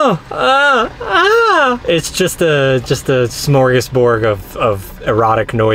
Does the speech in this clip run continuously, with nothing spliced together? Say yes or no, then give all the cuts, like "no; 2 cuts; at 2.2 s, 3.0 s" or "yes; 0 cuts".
yes; 0 cuts